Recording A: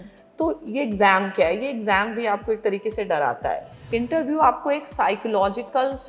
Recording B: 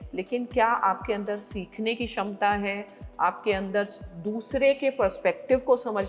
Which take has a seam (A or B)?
A